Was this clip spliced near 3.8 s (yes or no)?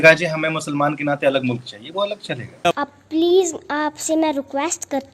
no